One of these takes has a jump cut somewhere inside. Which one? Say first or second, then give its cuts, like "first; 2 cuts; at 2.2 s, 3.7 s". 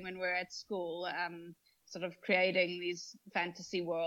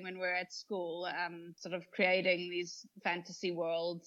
second; 1 cut; at 1.5 s